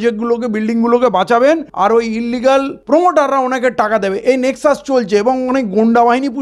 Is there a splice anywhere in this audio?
yes; 2 cuts; at 1.7 s, 2.8 s

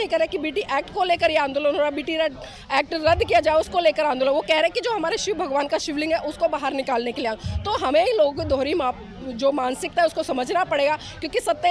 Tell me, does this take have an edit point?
no; 0 cuts

